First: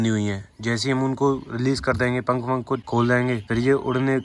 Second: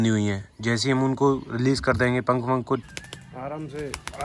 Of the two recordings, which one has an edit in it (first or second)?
second